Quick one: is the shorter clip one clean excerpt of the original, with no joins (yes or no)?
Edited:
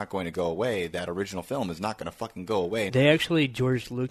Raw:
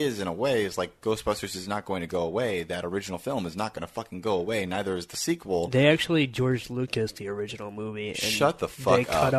no